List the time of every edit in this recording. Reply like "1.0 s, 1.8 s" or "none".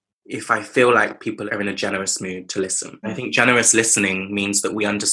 1.4 s, 3.0 s